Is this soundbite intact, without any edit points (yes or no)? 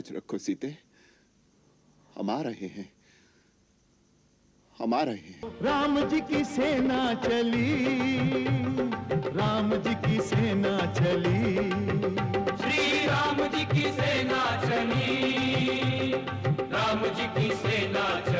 no